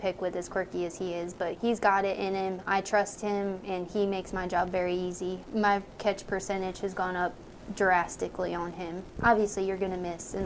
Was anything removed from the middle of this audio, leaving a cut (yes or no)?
yes